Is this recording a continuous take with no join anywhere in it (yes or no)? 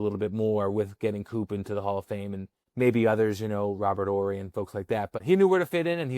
no